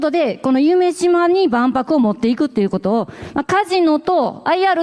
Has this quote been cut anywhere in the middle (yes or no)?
no